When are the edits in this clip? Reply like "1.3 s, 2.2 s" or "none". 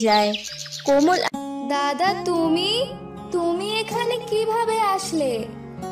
1.3 s

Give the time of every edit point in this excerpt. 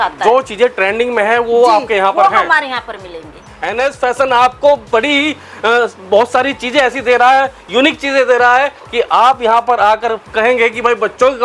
3.5 s

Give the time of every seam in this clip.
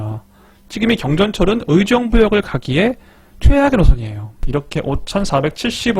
4.4 s

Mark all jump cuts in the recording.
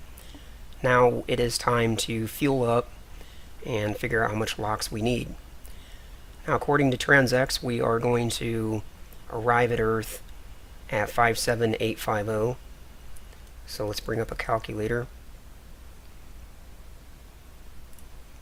none

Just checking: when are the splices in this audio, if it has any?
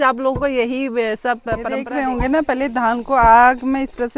1.8 s

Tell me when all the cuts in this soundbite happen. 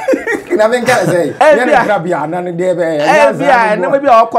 1.3 s

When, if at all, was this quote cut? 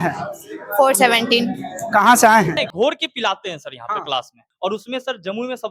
2.7 s, 4.4 s

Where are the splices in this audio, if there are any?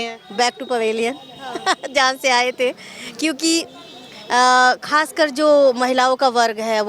none

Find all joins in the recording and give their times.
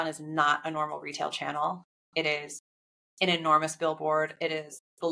none

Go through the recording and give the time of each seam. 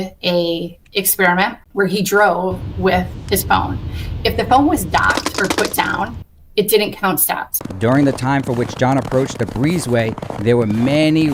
7.6 s

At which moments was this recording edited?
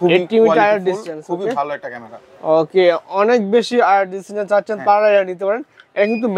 none

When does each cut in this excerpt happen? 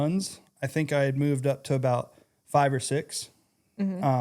none

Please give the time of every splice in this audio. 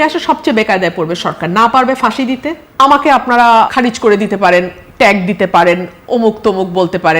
2.6 s, 3.7 s

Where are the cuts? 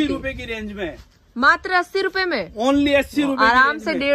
none

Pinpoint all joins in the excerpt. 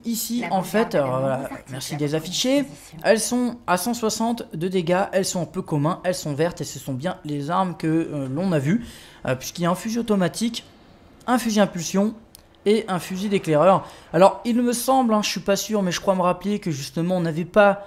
7.0 s

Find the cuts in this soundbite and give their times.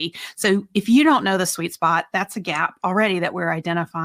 none

